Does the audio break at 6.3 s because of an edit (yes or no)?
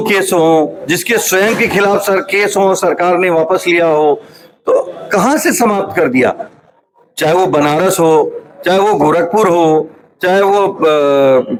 no